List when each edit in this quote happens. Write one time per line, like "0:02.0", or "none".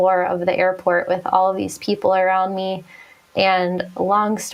none